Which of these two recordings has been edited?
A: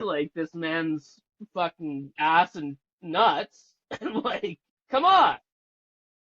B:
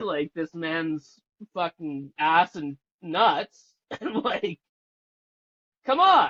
A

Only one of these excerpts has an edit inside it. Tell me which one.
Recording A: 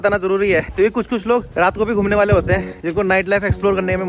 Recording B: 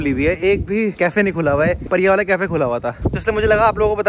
B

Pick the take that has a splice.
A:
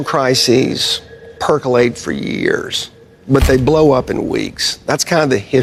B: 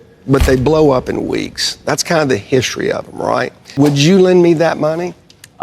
B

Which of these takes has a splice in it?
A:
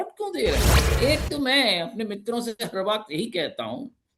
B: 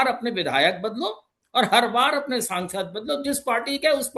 A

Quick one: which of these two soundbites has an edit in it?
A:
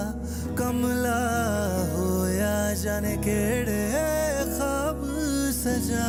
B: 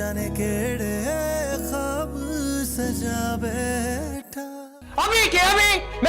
B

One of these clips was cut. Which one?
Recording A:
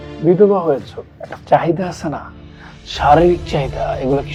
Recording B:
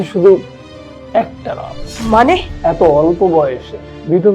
B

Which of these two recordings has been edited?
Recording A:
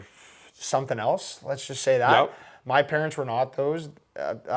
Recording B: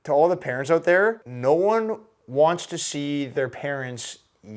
B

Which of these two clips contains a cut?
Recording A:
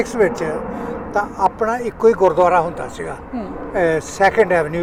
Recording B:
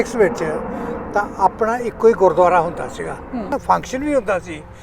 B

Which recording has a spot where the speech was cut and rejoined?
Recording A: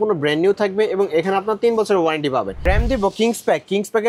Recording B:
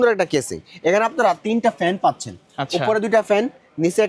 A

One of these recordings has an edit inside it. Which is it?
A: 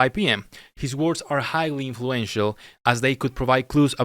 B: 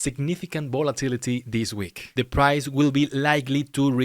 B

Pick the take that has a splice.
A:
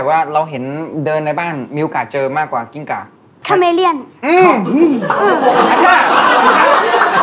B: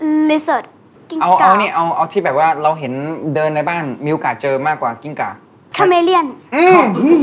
B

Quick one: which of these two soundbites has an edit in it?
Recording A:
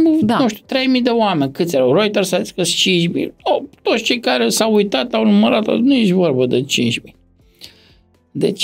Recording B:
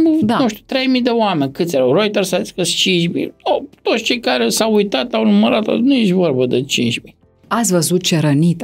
B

